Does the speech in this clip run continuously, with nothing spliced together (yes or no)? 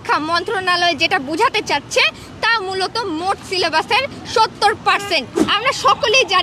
no